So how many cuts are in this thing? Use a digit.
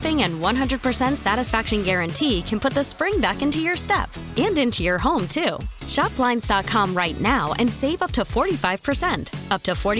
0